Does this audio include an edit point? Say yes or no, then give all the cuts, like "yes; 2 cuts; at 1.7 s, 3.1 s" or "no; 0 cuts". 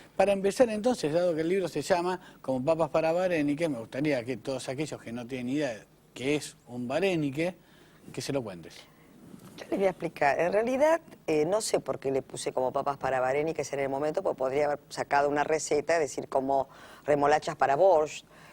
no; 0 cuts